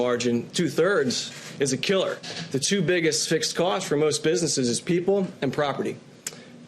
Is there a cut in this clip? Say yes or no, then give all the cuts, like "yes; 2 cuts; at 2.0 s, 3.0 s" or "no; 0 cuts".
yes; 1 cut; at 2.3 s